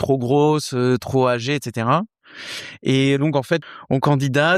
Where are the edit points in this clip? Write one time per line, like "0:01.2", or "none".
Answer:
0:03.6